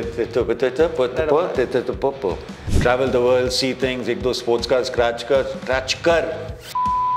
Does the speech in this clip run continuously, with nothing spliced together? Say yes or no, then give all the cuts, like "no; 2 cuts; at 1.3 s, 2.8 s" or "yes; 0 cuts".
yes; 0 cuts